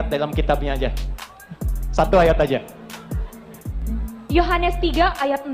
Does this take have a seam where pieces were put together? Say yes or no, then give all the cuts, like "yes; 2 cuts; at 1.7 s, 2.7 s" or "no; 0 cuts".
yes; 1 cut; at 3.9 s